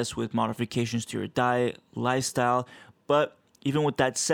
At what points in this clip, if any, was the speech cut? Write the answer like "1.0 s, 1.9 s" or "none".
none